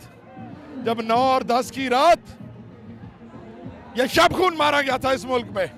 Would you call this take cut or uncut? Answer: uncut